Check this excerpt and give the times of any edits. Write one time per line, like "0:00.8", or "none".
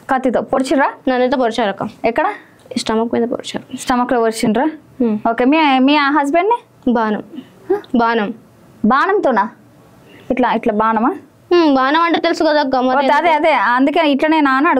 none